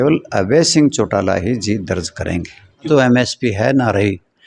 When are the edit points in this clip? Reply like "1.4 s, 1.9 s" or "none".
2.9 s